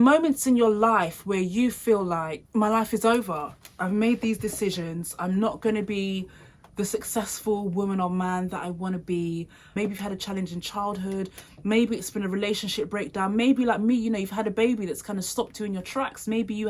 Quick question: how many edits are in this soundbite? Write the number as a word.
zero